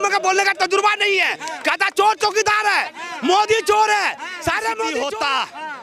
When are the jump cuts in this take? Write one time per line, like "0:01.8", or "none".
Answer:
0:04.8